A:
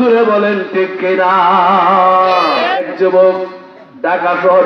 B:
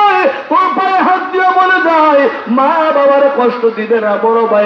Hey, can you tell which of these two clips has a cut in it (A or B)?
A